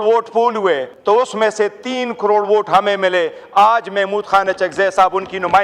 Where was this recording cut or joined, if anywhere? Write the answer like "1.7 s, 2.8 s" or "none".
0.9 s